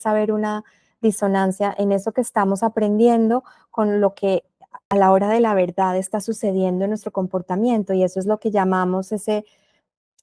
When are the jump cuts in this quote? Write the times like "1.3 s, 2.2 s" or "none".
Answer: 4.9 s